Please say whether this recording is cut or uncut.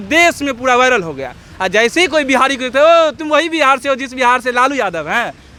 uncut